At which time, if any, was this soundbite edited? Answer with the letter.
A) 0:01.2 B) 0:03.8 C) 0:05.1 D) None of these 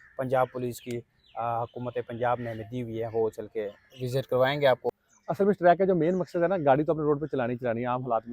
C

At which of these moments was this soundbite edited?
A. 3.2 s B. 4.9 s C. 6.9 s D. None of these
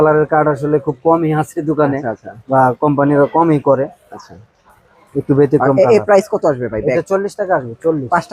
D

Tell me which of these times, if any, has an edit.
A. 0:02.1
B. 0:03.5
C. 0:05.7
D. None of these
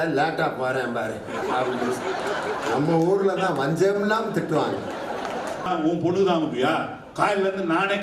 C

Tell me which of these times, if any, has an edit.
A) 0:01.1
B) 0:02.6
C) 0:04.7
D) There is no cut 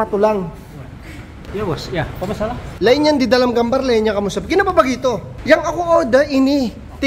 B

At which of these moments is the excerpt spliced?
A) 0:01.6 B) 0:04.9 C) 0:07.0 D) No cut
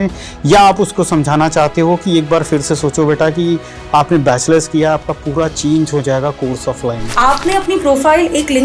C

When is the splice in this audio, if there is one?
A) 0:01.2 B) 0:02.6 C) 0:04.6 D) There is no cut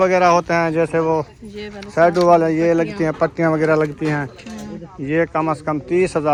D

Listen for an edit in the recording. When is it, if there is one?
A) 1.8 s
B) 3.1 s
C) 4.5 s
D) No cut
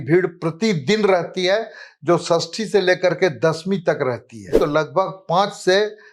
C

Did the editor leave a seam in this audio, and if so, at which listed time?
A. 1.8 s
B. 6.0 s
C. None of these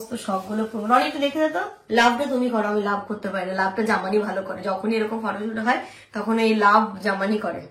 A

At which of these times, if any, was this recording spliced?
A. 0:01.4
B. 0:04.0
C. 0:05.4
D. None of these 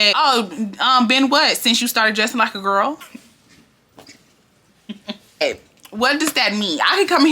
C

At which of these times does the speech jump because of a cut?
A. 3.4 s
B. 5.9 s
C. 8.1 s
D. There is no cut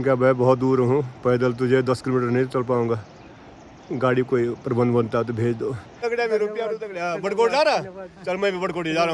B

